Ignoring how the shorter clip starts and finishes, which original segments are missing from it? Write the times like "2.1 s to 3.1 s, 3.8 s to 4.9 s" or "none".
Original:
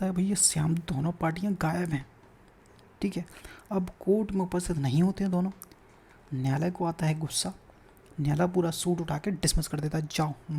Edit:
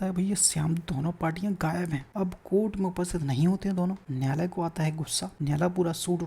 2.1 s to 3.6 s, 5.6 s to 6.3 s, 7.5 s to 8.0 s